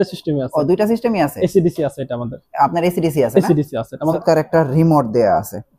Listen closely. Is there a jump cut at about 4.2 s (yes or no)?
yes